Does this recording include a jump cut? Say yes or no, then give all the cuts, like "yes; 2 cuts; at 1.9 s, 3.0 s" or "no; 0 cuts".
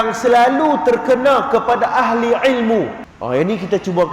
yes; 1 cut; at 3.1 s